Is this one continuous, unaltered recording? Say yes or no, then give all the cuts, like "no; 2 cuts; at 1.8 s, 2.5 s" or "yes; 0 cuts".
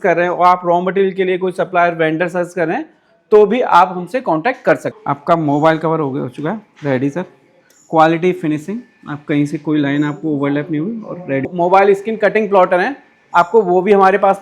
no; 2 cuts; at 4.9 s, 11.5 s